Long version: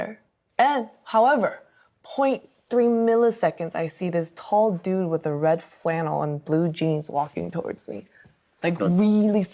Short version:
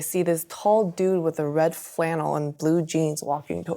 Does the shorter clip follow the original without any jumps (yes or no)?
yes